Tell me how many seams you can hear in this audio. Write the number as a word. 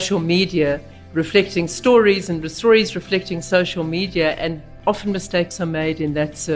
one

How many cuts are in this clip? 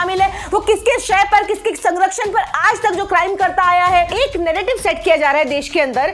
one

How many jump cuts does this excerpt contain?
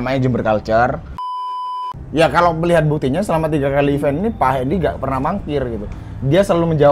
one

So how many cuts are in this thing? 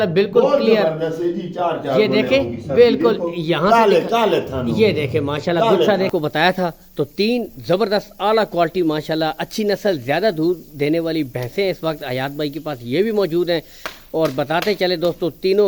one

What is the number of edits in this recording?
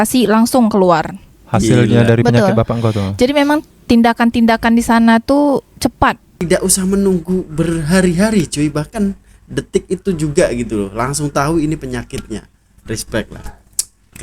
one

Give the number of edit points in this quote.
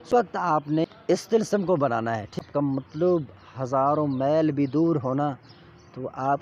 two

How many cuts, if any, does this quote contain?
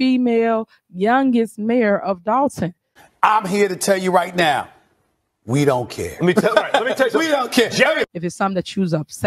one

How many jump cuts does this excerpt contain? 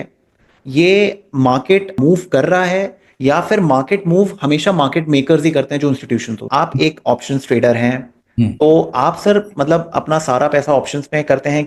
two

